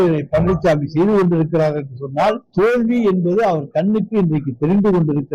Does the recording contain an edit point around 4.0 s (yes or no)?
no